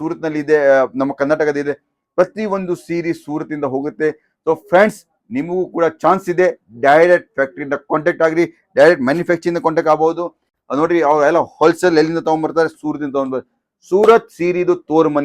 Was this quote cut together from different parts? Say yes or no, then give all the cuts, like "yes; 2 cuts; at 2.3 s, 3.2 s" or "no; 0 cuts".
no; 0 cuts